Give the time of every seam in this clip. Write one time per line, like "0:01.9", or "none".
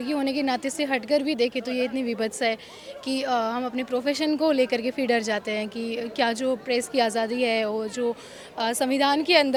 none